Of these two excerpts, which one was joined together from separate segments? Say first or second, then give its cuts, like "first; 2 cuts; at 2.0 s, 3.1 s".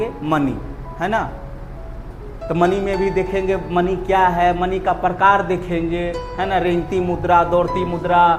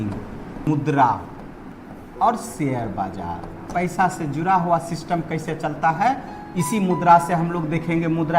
second; 3 cuts; at 0.7 s, 1.7 s, 3.7 s